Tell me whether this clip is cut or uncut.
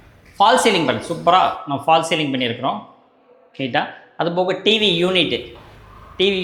uncut